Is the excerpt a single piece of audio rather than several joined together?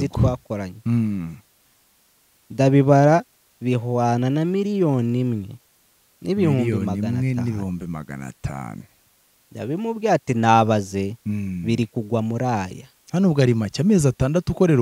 yes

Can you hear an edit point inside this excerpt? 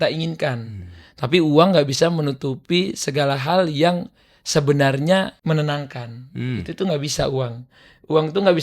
yes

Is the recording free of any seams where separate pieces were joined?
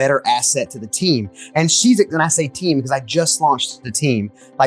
yes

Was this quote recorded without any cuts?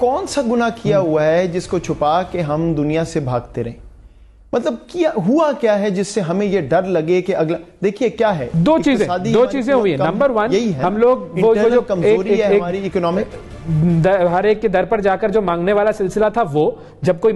yes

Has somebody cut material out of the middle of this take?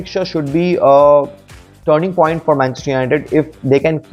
no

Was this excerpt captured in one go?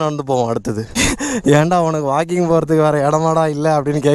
yes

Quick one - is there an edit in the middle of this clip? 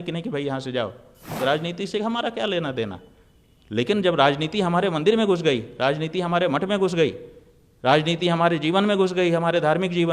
yes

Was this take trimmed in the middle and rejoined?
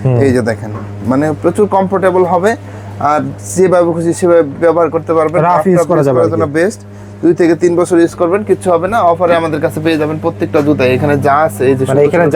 no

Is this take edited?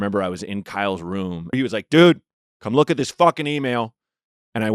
yes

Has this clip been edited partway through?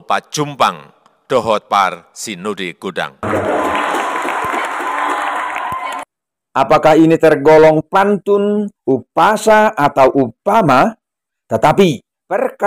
no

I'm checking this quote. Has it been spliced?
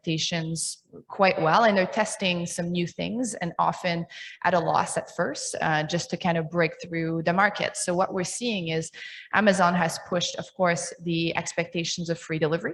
no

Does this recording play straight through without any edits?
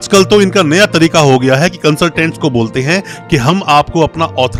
yes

